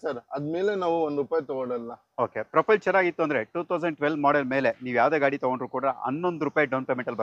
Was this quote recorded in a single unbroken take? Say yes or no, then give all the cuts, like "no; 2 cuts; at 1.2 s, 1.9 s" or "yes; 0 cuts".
yes; 0 cuts